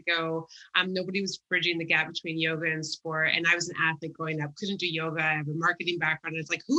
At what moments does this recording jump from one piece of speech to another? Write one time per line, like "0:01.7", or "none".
none